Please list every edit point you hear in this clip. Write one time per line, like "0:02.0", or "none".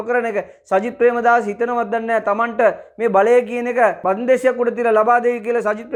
none